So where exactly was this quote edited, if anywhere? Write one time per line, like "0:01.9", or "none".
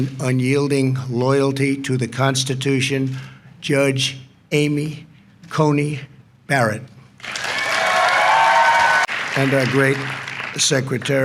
0:09.1